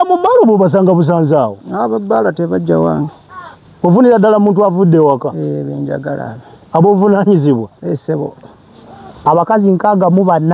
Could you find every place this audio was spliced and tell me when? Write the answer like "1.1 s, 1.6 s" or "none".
none